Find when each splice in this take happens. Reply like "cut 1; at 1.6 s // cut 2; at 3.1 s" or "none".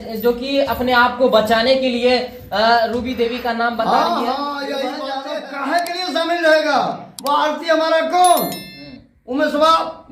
cut 1; at 5.2 s

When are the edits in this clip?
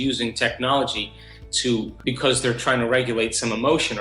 cut 1; at 1.9 s

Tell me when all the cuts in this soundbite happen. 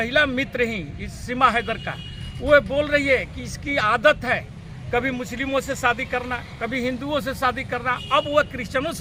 none

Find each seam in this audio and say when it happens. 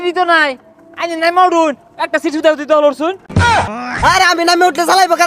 cut 1; at 3.5 s

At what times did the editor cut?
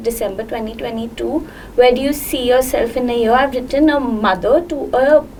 none

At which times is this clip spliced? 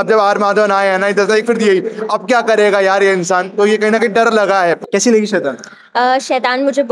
cut 1; at 4.8 s

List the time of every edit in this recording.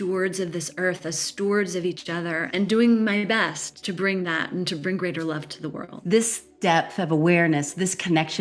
cut 1; at 2.5 s // cut 2; at 3.8 s // cut 3; at 5.9 s

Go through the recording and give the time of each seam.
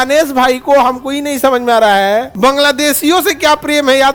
none

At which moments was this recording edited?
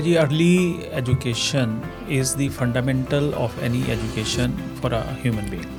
none

